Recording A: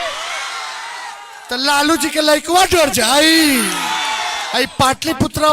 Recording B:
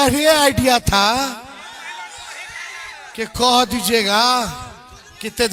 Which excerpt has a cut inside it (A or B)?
A